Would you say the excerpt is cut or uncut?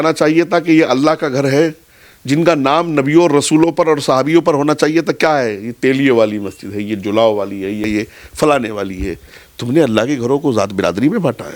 cut